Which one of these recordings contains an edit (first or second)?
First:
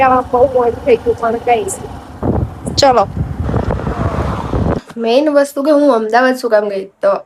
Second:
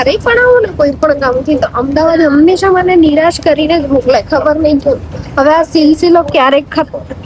first